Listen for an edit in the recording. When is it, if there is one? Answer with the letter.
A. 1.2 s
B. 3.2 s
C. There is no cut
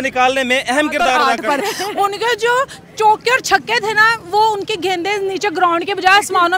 A